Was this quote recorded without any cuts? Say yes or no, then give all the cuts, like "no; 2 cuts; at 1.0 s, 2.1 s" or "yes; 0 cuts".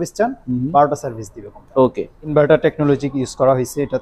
yes; 0 cuts